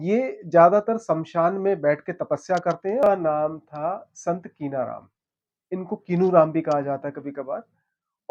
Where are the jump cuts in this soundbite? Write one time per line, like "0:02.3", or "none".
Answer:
0:03.0